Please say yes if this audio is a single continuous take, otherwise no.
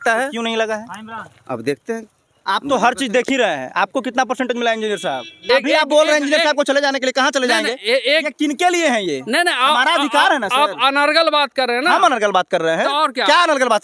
no